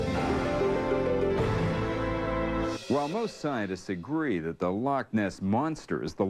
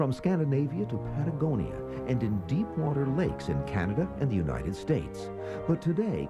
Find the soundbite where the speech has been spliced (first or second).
second